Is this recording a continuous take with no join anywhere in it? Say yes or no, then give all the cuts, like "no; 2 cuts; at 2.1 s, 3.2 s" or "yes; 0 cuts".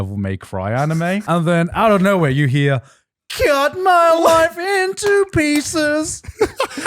no; 1 cut; at 1.2 s